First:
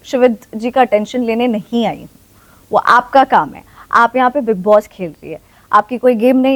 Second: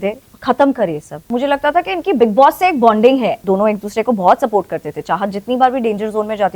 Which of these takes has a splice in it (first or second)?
second